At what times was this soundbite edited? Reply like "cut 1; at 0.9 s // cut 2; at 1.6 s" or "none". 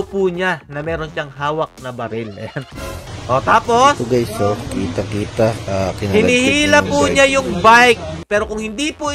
cut 1; at 3.1 s // cut 2; at 8.2 s